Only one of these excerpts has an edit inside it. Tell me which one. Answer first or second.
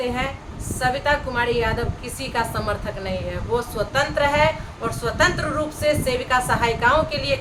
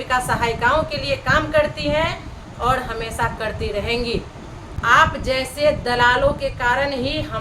second